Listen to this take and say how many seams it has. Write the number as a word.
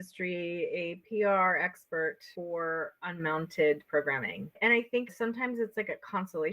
one